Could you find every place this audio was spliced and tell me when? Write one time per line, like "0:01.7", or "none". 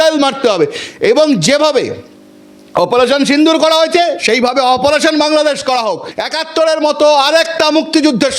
0:06.1